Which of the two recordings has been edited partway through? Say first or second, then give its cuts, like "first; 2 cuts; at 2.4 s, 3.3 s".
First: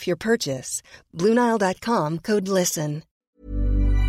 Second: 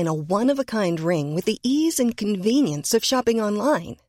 first; 1 cut; at 3.1 s